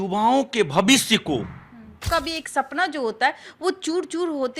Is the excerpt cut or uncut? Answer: cut